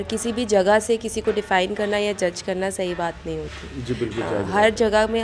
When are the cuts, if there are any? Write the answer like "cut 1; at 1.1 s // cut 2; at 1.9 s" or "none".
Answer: none